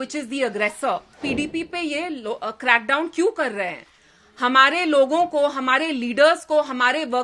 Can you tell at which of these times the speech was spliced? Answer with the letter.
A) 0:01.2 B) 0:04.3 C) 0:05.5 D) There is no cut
A